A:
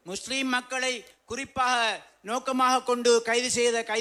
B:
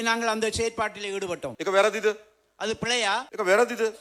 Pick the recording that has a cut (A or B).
B